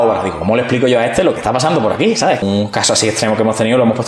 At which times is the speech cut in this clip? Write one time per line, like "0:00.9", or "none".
0:02.4